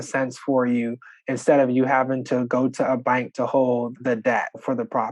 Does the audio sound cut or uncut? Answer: cut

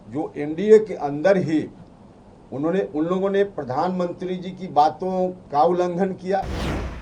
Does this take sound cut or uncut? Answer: uncut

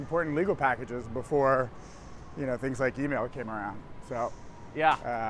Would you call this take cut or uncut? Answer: uncut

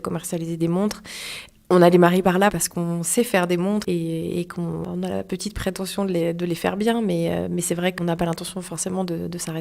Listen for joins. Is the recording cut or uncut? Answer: cut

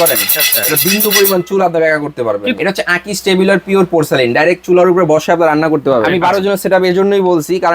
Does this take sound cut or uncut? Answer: cut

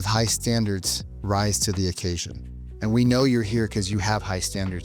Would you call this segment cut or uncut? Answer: uncut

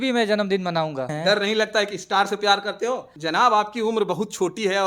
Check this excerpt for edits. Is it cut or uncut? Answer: cut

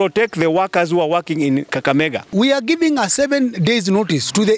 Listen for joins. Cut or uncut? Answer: cut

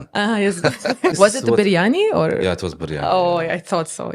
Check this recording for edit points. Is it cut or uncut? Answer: cut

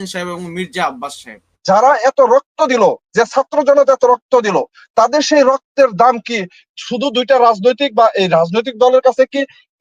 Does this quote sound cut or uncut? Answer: cut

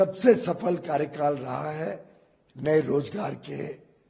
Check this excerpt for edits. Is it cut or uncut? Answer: uncut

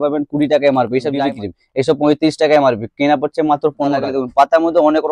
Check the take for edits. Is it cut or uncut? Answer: cut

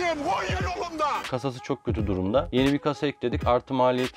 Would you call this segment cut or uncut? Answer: cut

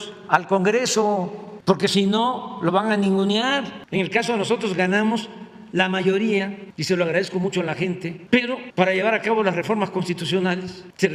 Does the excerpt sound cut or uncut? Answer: uncut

